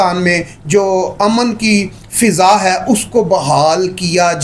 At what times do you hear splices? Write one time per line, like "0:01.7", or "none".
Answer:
none